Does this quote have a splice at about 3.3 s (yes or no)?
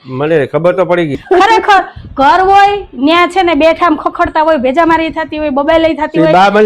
no